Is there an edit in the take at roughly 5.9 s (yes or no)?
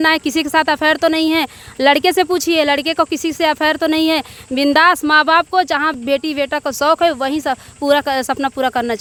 no